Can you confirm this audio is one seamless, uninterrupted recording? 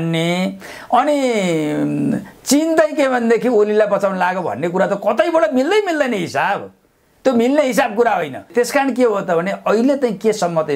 no; 1 cut; at 8.4 s

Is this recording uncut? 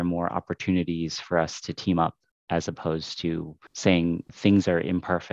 yes; 0 cuts

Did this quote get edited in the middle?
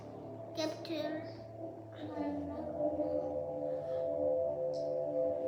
no; 0 cuts

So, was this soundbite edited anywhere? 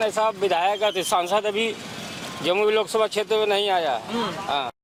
no; 0 cuts

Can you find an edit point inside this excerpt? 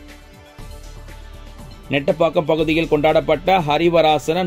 yes; 1 cut; at 1.5 s

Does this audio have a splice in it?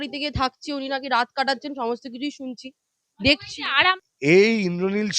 yes; 1 cut; at 3.6 s

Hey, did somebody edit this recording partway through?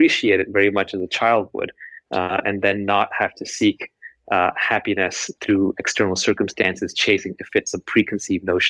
no; 0 cuts

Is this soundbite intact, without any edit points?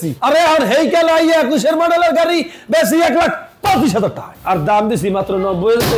no; 1 cut; at 4.3 s

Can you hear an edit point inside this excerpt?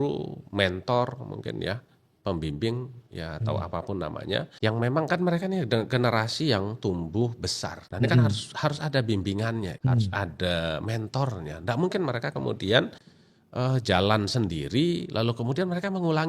yes; 3 cuts; at 4.5 s, 7.8 s, 9.7 s

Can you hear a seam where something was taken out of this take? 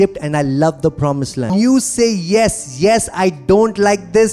yes; 1 cut; at 1.5 s

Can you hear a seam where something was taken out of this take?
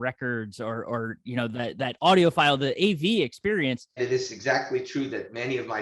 yes; 1 cut; at 4.0 s

